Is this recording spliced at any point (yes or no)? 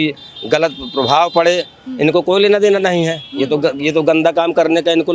no